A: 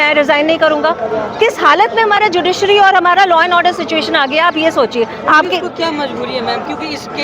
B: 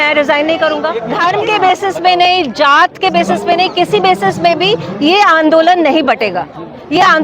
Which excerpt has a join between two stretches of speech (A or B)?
B